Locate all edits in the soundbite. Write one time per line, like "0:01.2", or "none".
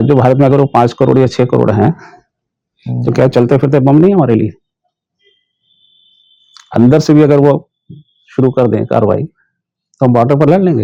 none